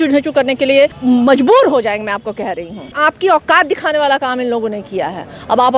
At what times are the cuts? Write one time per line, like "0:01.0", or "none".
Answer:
0:01.0
0:02.9